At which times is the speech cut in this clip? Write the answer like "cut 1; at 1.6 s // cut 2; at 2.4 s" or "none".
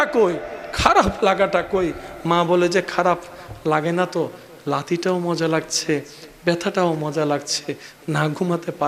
none

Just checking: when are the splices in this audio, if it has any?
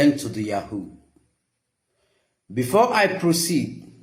none

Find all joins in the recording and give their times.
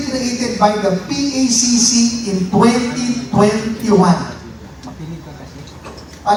none

